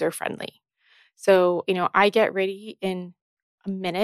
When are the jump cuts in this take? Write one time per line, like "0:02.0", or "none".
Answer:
0:01.6